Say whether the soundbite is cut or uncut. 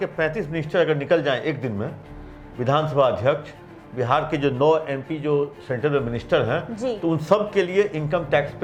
uncut